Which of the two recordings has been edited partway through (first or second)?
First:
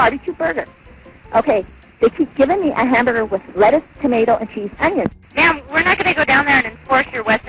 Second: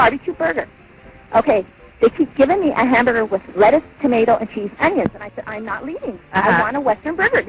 first